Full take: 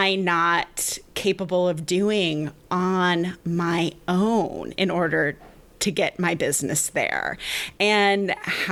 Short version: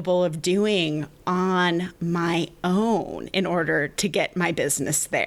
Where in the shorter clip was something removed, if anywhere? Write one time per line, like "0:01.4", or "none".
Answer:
0:03.9